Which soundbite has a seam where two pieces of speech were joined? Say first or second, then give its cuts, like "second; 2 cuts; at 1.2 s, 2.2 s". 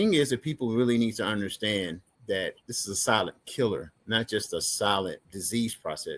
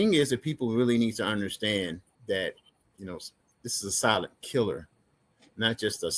first; 3 cuts; at 2.7 s, 3.9 s, 5.3 s